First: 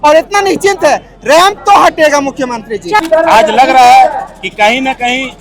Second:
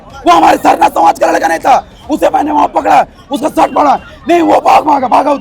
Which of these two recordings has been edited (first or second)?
first